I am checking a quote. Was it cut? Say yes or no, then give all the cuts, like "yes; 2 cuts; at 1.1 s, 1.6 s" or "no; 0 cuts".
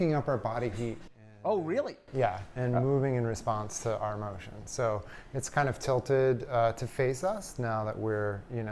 no; 0 cuts